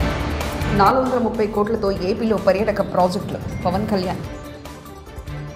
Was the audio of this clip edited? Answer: no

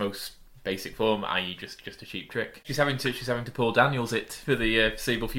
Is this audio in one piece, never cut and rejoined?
no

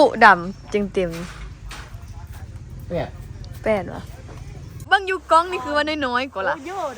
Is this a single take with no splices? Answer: no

